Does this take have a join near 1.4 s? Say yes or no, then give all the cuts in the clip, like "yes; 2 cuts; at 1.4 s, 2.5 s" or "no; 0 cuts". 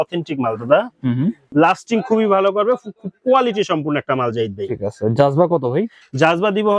yes; 1 cut; at 1.4 s